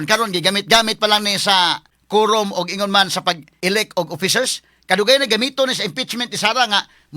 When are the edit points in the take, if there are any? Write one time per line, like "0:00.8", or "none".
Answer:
0:01.9
0:03.5